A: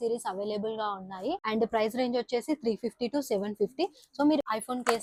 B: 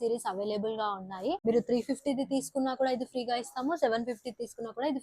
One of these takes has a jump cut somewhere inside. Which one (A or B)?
B